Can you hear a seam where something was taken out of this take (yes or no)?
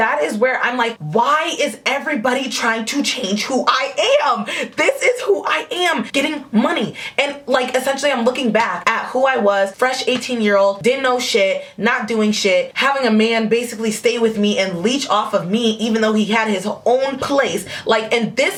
no